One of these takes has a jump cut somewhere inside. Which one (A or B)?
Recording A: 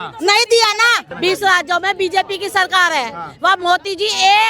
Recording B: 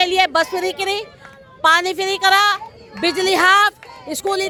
A